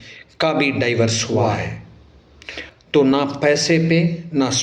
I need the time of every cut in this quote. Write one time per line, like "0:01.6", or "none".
0:01.4